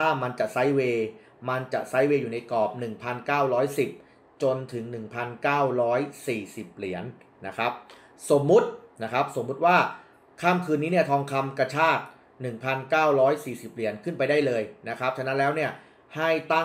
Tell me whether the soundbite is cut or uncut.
uncut